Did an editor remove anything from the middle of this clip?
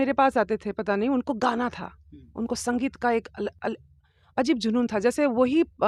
no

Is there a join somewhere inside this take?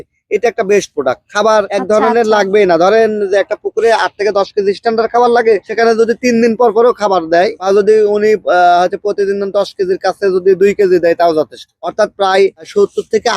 no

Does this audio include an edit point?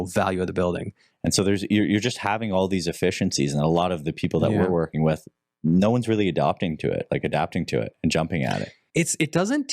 yes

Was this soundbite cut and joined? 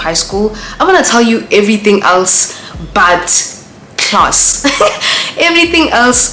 no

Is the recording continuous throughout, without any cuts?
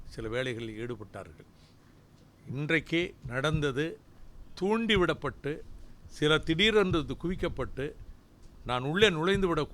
yes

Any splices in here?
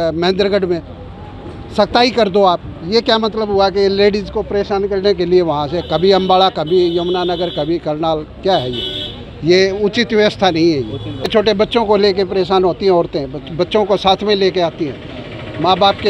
yes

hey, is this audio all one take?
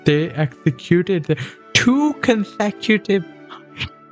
yes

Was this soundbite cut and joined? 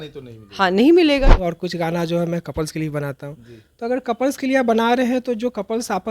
yes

